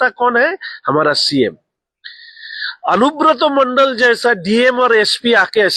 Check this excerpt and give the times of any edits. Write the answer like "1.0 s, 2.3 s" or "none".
none